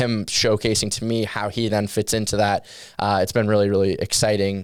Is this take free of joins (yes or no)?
yes